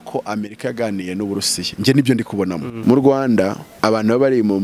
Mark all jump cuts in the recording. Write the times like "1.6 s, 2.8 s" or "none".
2.7 s, 3.6 s

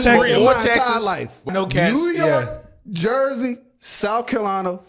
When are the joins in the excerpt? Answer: 1.5 s

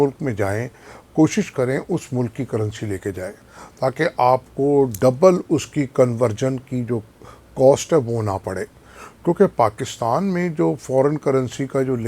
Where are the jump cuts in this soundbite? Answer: none

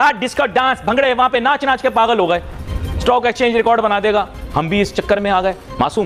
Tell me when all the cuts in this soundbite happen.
none

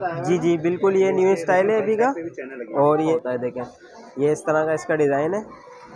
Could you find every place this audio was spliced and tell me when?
3.1 s

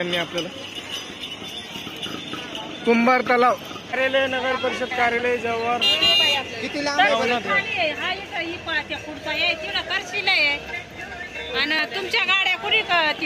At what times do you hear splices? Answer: 4.0 s

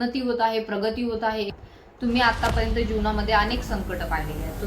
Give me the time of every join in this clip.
1.6 s

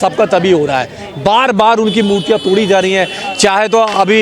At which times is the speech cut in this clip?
none

